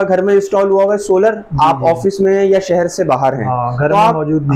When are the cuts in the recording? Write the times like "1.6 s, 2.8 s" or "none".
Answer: none